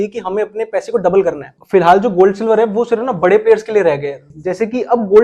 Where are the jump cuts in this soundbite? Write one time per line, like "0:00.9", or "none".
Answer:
0:01.5
0:04.3